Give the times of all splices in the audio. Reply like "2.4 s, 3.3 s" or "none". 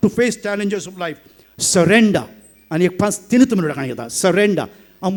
none